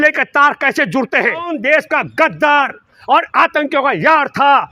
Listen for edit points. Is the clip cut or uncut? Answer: cut